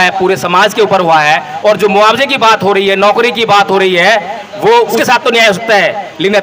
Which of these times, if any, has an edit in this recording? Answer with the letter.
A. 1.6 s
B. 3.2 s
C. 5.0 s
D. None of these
C